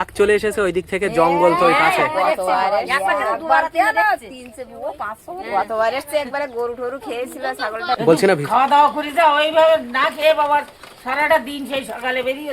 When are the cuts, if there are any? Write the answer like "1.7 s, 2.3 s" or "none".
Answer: 8.0 s

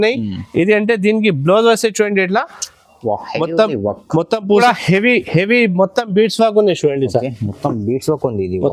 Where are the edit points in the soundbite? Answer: 4.6 s

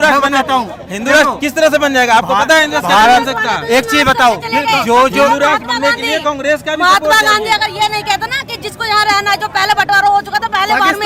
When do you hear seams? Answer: none

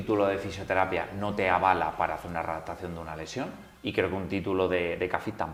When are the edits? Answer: none

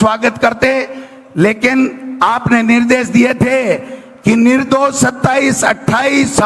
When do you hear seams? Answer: none

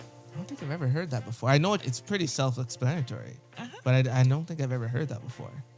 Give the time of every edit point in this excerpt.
1.8 s

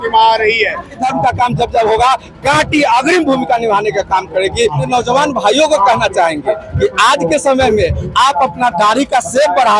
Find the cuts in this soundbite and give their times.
1.0 s, 4.8 s

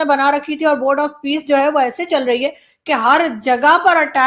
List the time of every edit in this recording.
none

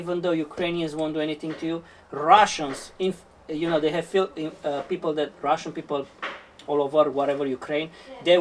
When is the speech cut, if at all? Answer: none

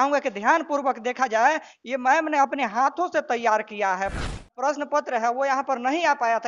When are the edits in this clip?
4.2 s

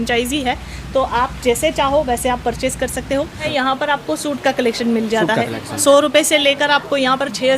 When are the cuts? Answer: 3.5 s

